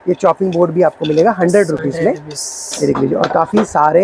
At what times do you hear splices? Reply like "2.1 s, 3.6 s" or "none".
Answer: none